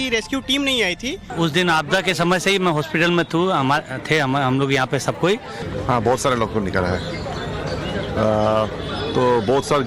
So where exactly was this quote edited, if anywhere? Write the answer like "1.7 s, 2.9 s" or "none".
1.3 s, 3.9 s, 5.6 s